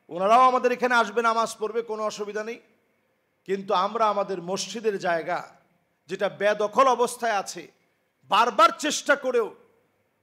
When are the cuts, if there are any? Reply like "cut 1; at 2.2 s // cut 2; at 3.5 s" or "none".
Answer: none